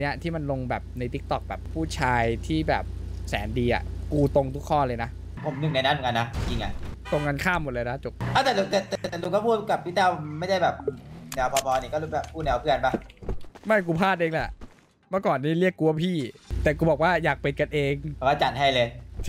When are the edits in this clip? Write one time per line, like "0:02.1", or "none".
0:01.6
0:05.4
0:06.9
0:08.2
0:16.4
0:18.1